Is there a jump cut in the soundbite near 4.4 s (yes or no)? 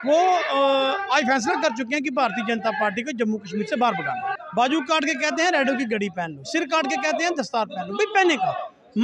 yes